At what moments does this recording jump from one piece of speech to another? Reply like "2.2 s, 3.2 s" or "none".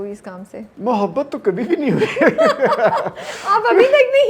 none